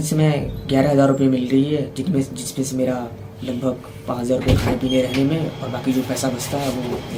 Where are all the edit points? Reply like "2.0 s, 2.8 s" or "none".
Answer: none

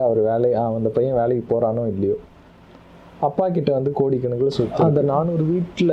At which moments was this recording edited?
4.7 s

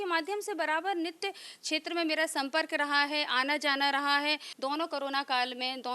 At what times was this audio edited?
4.5 s

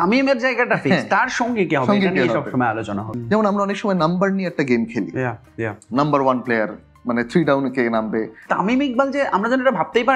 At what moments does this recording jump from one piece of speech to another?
3.0 s, 8.4 s

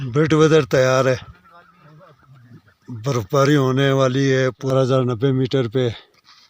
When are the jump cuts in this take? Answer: 4.7 s

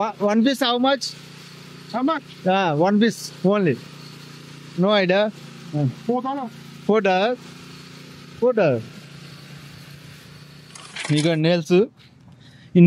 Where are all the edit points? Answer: 10.9 s

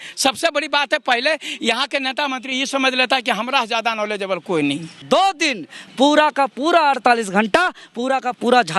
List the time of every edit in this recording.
5.0 s

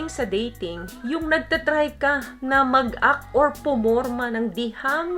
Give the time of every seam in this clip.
none

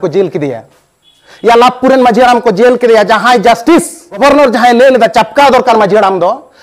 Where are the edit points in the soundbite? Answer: 4.2 s

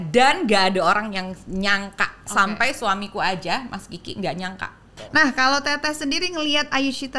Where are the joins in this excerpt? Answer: 4.9 s

